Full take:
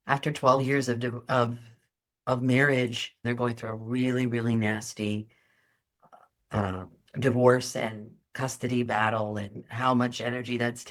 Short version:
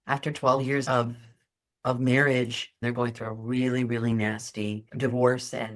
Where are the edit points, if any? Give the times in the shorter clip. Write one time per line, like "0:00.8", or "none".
0:00.8
0:04.9